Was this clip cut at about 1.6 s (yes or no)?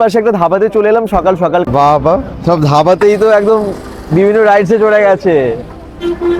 yes